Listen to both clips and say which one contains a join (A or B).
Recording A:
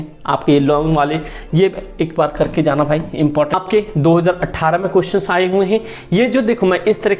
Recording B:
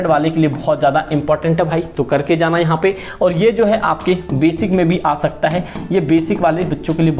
A